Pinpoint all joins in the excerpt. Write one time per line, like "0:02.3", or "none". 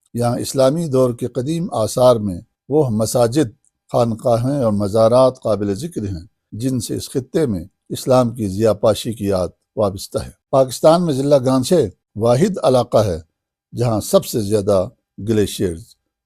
0:10.3
0:12.0